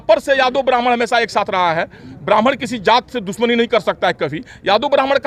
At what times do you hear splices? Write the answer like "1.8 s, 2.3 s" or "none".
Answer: none